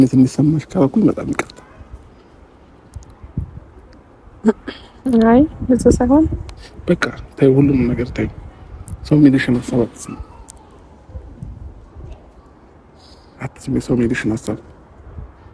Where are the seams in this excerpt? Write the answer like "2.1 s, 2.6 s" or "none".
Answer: none